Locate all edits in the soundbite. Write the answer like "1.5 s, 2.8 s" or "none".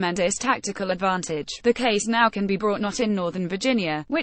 1.6 s